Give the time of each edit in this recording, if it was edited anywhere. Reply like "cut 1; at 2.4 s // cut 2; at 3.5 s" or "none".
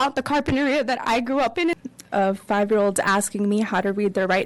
cut 1; at 1.7 s